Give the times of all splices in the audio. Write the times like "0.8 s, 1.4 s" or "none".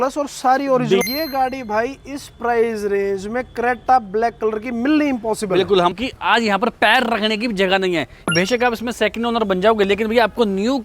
1.0 s, 6.0 s, 8.3 s

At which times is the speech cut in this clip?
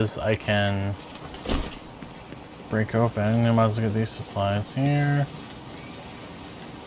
5.3 s

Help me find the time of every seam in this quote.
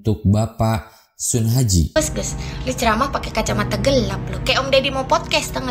2.0 s

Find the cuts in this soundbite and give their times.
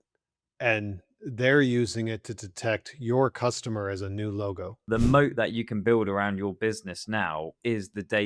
4.9 s

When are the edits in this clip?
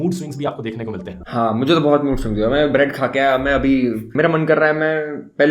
4.0 s

